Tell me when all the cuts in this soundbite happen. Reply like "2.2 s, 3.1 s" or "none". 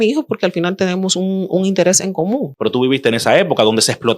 2.5 s

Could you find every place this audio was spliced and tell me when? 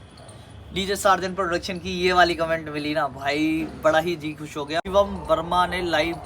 4.8 s

